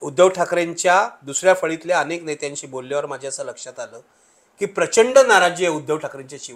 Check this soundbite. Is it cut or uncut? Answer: uncut